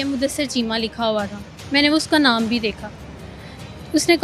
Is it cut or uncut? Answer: uncut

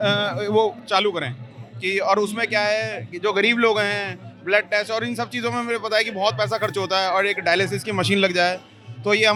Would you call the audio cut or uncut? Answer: uncut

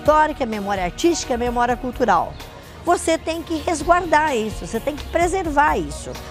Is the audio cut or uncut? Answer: uncut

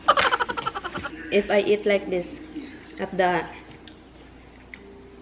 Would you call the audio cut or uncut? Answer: cut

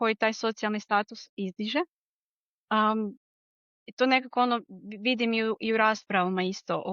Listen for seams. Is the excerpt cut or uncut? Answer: uncut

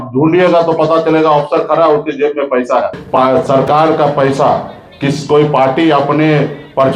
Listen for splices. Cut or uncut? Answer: cut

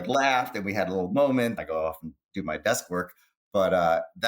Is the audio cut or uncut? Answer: cut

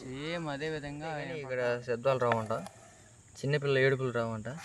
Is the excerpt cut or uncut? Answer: cut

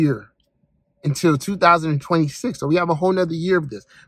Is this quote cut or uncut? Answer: uncut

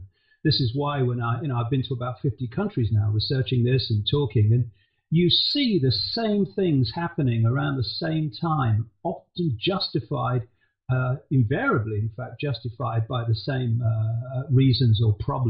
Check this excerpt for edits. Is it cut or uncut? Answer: cut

